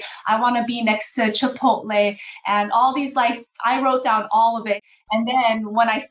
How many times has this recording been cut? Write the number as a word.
one